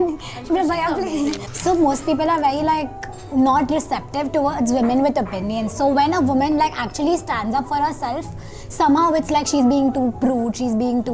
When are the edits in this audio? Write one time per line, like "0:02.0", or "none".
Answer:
0:01.5

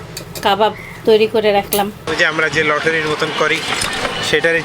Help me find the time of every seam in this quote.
0:02.0

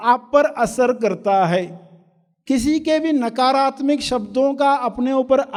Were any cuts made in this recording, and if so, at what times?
none

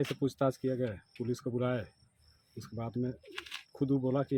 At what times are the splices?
none

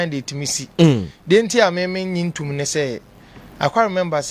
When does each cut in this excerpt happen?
none

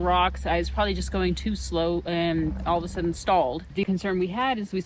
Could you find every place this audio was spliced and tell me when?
0:03.8

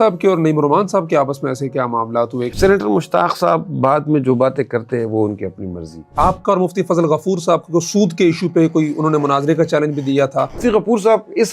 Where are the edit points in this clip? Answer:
0:02.5
0:06.1
0:10.6

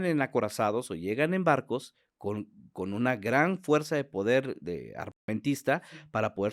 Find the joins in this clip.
none

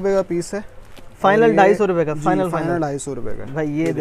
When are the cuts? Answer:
none

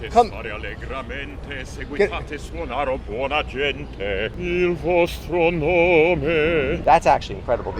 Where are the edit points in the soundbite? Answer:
0:04.3
0:06.8

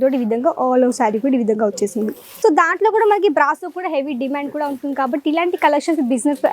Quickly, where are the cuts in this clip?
0:02.2

